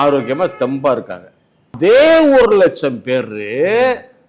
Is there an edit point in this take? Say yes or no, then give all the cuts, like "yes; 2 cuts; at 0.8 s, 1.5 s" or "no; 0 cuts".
yes; 1 cut; at 1.7 s